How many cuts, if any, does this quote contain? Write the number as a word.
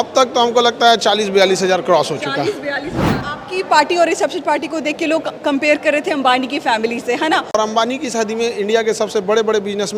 two